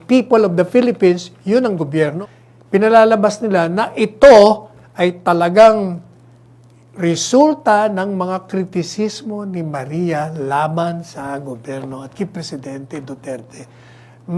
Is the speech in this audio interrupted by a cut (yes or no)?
yes